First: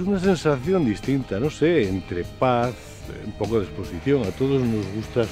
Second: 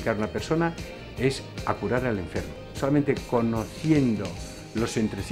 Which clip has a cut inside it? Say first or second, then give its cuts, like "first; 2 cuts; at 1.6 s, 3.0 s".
second; 1 cut; at 2.6 s